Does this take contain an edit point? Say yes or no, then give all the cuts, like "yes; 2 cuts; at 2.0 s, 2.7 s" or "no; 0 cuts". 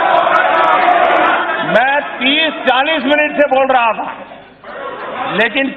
yes; 1 cut; at 1.3 s